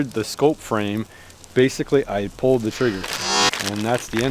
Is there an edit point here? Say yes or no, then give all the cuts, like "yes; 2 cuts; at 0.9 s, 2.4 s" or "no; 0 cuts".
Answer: no; 0 cuts